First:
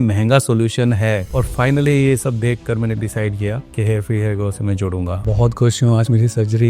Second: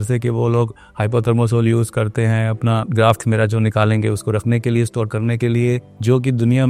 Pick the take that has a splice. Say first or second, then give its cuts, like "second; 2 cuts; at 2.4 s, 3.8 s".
first; 2 cuts; at 1.3 s, 5.3 s